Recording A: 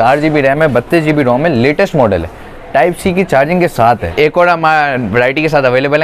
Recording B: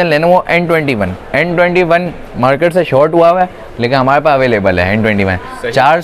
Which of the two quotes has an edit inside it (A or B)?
A